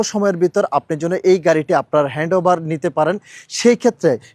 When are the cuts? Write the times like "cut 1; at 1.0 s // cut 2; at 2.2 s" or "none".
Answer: none